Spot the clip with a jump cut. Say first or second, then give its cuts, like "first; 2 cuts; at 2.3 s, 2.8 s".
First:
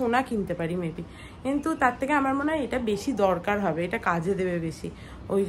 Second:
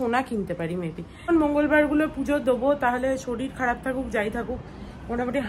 second; 1 cut; at 1.3 s